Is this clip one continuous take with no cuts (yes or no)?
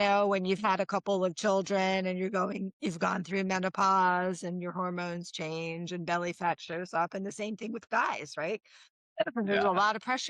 yes